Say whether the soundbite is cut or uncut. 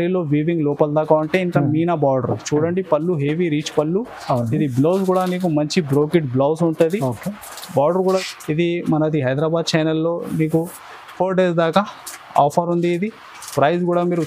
cut